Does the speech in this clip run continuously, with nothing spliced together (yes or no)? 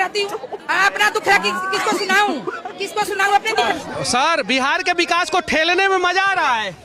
no